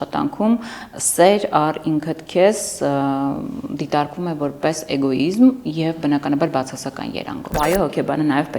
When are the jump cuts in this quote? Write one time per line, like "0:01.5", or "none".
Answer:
0:07.5

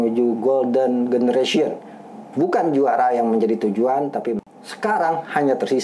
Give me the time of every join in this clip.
0:04.4

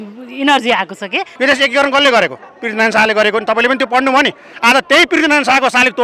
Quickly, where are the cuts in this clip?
0:01.3

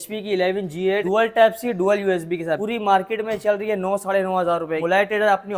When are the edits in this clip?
0:01.0
0:02.6
0:04.8

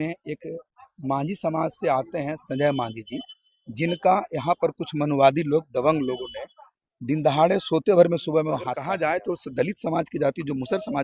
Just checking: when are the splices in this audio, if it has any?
0:08.8

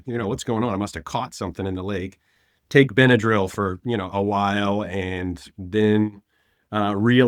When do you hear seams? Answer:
none

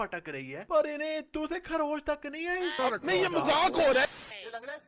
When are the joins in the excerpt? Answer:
0:02.8
0:04.0

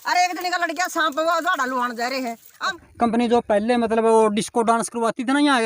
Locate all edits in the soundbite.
0:02.8

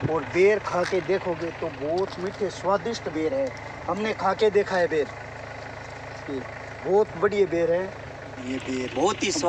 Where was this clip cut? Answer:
0:08.5

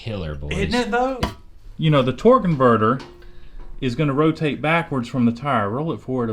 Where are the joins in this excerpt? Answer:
0:01.2

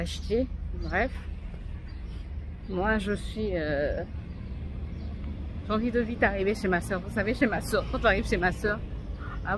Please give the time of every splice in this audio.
none

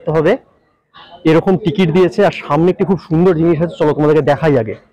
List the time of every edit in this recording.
none

